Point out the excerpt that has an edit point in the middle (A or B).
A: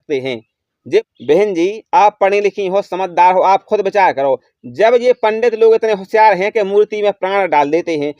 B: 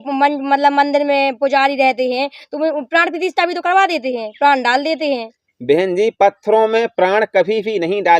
A